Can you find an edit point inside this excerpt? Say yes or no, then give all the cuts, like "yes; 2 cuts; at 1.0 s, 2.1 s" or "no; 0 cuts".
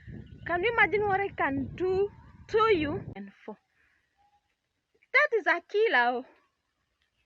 yes; 1 cut; at 3.1 s